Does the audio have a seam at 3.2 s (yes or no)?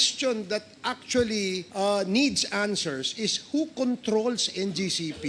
no